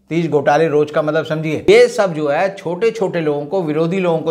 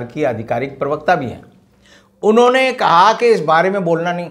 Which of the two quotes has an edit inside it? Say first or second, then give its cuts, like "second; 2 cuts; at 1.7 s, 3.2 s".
first; 1 cut; at 1.7 s